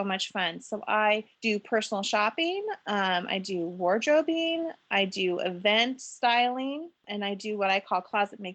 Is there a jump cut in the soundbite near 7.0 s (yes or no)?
yes